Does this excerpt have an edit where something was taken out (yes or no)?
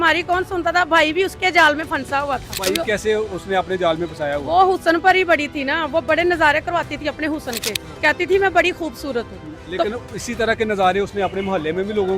no